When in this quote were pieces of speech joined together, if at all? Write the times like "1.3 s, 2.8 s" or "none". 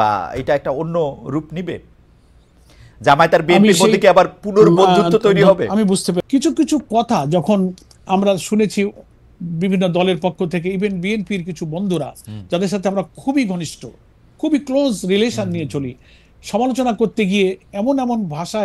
6.2 s